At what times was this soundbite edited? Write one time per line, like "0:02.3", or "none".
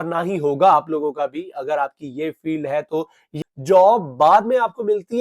0:03.3